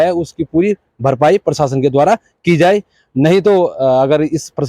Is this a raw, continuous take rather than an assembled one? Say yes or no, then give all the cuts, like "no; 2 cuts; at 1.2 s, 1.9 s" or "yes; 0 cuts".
yes; 0 cuts